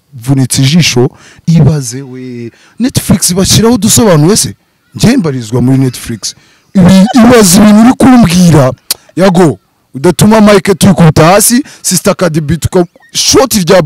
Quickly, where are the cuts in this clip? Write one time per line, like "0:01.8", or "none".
0:01.3